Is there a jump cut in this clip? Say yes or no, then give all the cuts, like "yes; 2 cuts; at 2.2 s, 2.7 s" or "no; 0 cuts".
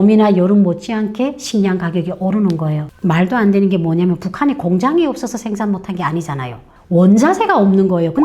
yes; 1 cut; at 2.9 s